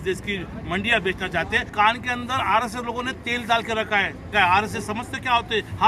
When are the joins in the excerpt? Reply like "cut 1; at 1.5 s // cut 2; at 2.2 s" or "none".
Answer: cut 1; at 1.7 s // cut 2; at 4.3 s